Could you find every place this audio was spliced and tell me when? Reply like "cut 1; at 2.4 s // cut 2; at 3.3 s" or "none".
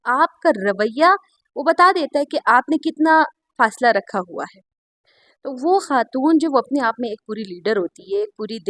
none